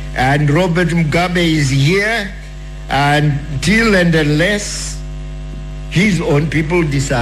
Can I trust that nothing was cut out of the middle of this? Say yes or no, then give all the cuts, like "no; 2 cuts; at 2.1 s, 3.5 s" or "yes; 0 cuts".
yes; 0 cuts